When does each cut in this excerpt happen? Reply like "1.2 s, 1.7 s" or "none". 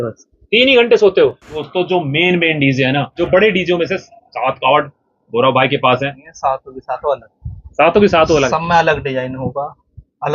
1.5 s, 3.2 s, 6.2 s